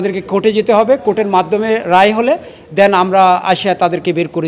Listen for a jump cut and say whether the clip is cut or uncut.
uncut